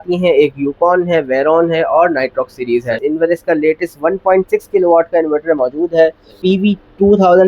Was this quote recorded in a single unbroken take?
no; 2 cuts; at 3.0 s, 6.4 s

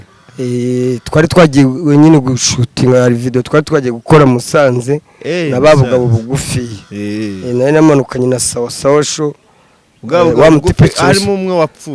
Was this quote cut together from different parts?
no; 0 cuts

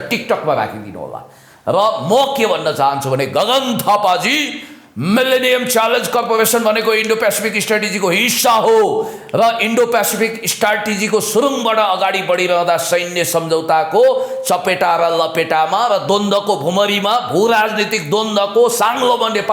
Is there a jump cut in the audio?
no; 0 cuts

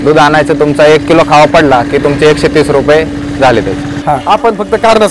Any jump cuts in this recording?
yes; 1 cut; at 3.9 s

